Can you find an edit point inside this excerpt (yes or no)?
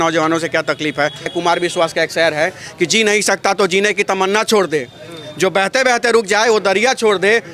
yes